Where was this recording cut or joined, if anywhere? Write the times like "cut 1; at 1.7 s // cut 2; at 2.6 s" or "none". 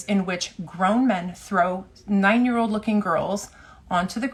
none